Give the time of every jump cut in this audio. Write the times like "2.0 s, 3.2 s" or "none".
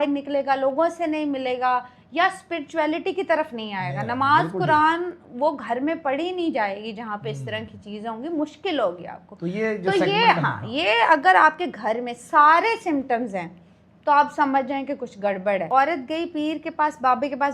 15.7 s